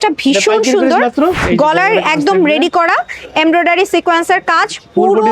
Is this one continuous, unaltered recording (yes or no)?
no